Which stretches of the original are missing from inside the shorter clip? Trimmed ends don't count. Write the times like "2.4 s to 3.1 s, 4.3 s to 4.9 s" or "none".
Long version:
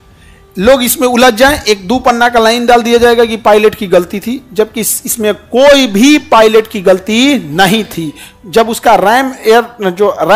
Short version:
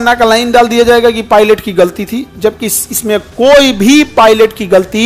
none